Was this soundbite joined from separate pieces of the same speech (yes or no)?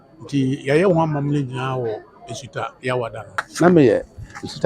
yes